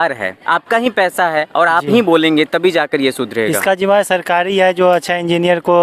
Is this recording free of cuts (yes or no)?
yes